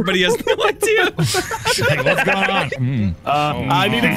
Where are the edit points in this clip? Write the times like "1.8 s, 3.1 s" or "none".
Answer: 2.8 s